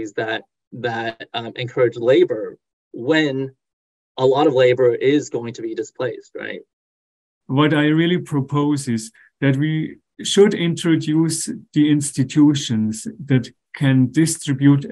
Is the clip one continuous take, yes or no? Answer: no